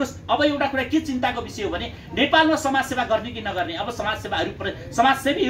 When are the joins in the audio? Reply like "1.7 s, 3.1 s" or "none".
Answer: none